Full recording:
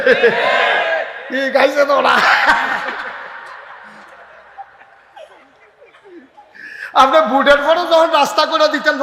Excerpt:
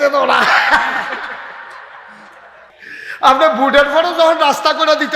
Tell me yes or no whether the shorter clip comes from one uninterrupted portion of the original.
no